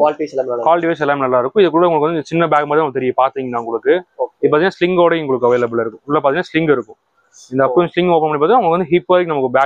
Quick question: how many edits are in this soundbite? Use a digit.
0